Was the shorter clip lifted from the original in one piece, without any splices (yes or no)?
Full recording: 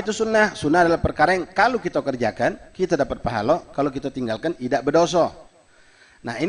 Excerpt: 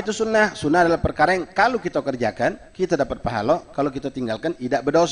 yes